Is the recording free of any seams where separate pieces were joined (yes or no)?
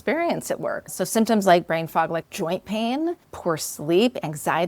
no